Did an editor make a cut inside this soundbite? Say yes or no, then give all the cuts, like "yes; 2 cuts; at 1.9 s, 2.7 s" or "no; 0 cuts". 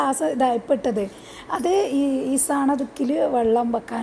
no; 0 cuts